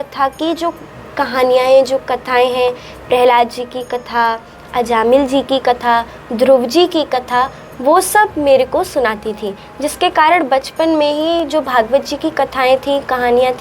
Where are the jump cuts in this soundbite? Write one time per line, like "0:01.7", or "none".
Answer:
none